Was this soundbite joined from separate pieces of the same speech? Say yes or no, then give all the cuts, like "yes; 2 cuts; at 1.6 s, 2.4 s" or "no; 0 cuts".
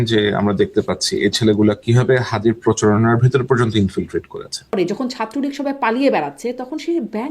yes; 1 cut; at 4.7 s